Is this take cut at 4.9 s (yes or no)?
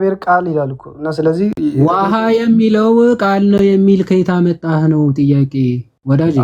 no